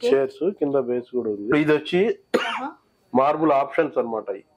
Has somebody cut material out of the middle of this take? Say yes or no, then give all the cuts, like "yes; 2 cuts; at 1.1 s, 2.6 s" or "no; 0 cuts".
yes; 1 cut; at 1.5 s